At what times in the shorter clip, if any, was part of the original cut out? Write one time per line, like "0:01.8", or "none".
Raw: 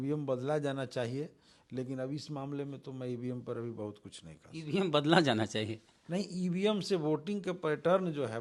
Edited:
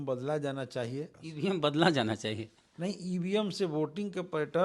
0:01.2